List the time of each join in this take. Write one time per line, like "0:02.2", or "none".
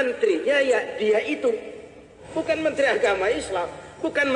0:02.2